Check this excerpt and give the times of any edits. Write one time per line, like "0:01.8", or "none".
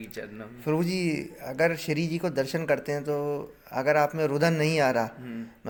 none